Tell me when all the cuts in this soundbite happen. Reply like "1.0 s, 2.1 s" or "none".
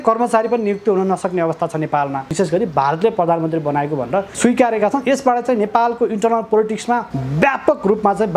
2.3 s, 4.3 s, 7.2 s